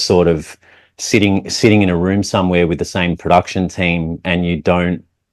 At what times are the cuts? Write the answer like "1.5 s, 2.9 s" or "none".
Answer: none